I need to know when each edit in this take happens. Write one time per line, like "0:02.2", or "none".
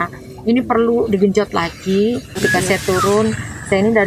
0:02.4